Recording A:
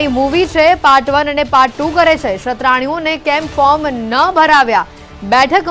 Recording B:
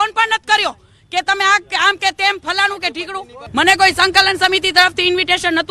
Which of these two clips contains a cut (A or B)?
A